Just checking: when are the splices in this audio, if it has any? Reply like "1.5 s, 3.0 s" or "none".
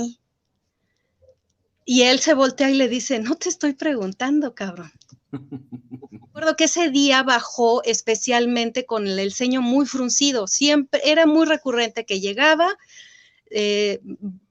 6.4 s